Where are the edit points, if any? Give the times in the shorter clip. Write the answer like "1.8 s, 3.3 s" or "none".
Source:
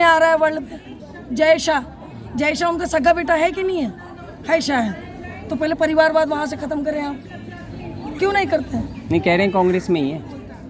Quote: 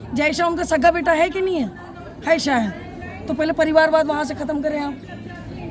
none